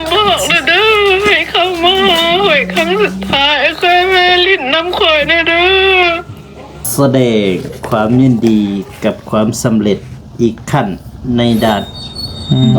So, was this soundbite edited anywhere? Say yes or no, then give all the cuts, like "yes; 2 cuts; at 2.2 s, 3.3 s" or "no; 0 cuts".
yes; 1 cut; at 6.8 s